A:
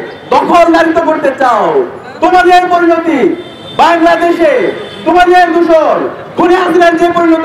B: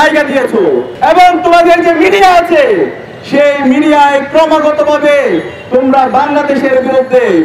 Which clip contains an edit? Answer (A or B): B